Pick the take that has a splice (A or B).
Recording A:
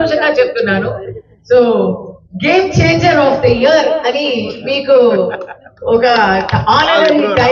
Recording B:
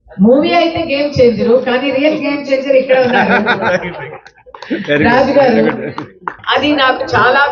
B